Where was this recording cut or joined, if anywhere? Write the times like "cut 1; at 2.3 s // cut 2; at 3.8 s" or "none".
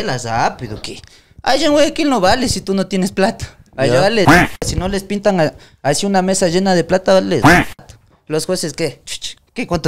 none